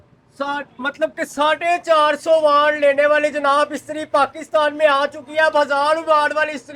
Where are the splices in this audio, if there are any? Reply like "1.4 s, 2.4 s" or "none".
none